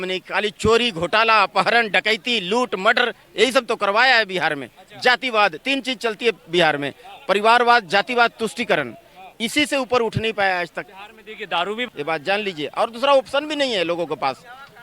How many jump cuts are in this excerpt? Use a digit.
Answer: 1